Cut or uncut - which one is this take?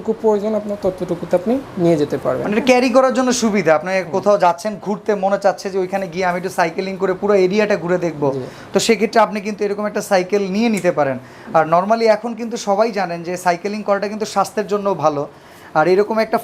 uncut